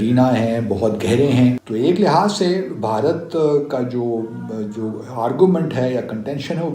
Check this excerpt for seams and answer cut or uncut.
cut